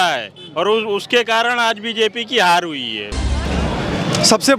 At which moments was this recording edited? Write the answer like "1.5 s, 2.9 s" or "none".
3.5 s